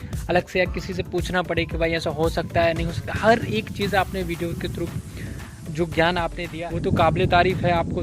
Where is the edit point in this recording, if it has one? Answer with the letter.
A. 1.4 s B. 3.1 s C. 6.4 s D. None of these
C